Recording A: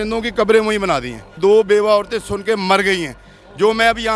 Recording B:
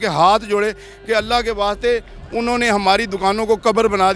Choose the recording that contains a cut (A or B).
A